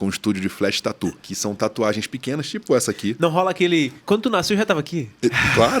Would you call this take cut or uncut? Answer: cut